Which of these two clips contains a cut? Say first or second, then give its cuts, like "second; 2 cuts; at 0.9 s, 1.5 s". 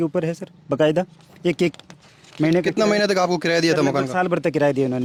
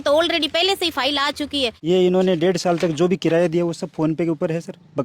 second; 1 cut; at 1.8 s